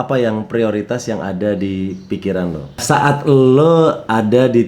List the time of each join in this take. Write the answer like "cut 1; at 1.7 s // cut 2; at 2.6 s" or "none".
cut 1; at 2.8 s